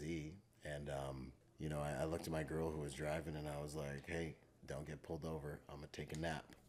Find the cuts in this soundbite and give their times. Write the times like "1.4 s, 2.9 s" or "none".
1.4 s, 4.5 s

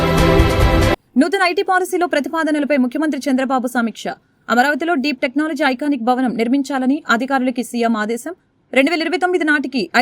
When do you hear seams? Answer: 0.9 s

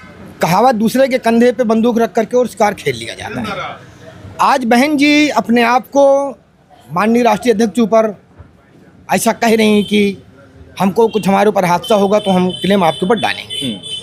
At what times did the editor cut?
none

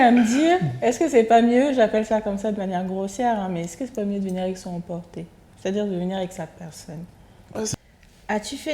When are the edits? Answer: 7.7 s

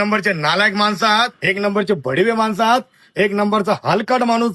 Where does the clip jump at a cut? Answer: 1.4 s

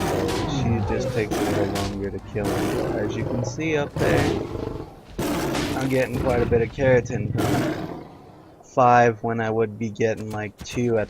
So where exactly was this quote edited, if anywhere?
5.7 s

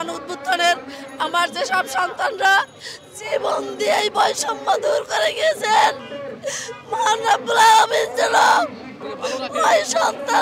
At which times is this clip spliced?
none

